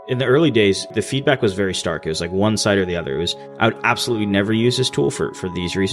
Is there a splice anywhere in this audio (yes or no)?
yes